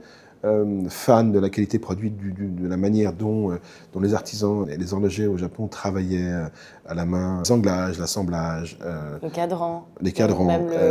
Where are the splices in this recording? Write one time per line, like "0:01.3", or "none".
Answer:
0:04.7
0:07.5